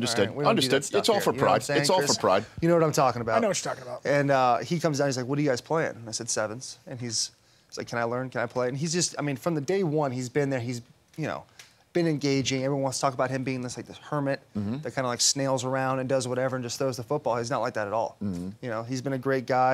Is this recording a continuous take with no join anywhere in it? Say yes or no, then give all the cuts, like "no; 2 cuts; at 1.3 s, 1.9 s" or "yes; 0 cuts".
yes; 0 cuts